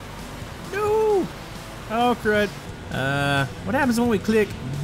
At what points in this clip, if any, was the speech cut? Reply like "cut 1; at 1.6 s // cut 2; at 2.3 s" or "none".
cut 1; at 2.6 s